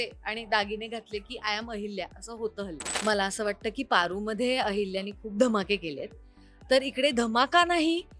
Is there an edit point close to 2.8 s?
yes; 1 cut; at 2.8 s

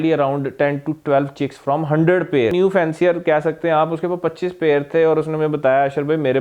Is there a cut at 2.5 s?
yes; 1 cut; at 2.5 s

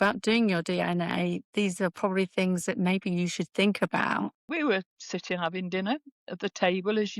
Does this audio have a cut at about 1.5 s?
no; 1 cut; at 4.4 s

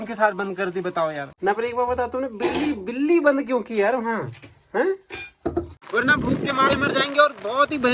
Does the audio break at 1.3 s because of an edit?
yes; 2 cuts; at 1.3 s, 5.8 s

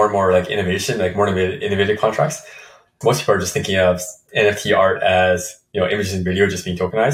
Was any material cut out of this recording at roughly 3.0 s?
yes; 1 cut; at 3.0 s

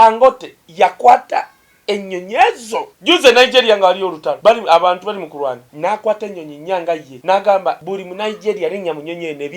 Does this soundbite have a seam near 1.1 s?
no; 5 cuts; at 2.9 s, 4.3 s, 5.7 s, 7.1 s, 7.8 s

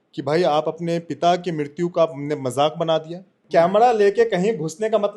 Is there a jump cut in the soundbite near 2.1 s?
no; 1 cut; at 3.3 s

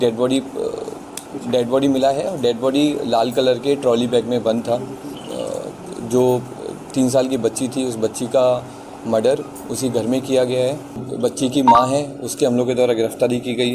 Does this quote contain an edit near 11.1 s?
yes; 2 cuts; at 5.2 s, 11.1 s

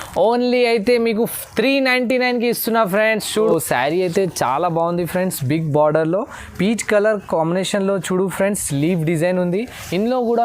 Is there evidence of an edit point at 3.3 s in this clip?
yes; 1 cut; at 3.3 s

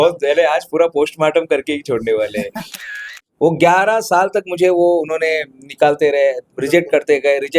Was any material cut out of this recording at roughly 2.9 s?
yes; 1 cut; at 2.9 s

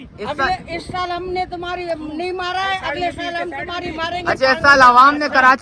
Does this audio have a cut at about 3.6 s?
no; 0 cuts

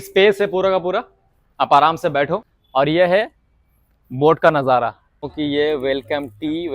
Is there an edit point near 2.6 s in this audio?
yes; 2 cuts; at 2.6 s, 5.2 s

